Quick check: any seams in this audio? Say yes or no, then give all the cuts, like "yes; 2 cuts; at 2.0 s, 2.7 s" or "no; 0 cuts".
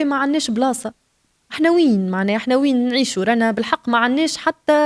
no; 0 cuts